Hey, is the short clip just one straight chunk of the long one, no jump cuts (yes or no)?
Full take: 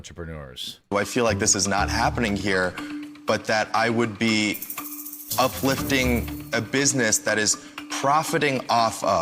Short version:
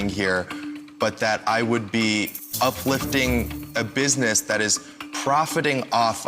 no